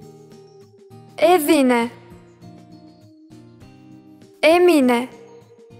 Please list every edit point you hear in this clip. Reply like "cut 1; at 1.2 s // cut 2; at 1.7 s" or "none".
none

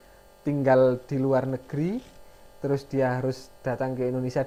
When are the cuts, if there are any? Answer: none

